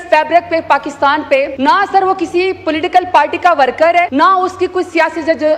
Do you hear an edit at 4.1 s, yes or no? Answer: yes